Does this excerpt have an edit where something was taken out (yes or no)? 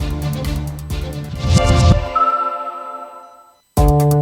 no